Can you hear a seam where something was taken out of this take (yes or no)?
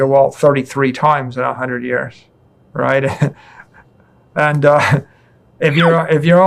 no